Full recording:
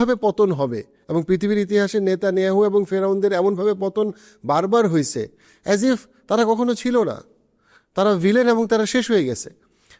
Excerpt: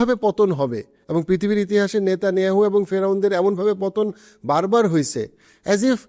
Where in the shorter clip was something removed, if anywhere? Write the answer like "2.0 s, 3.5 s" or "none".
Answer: none